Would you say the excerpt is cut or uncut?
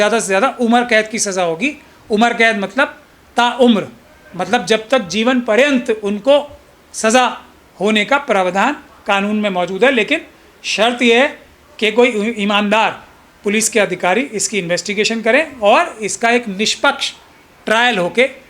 uncut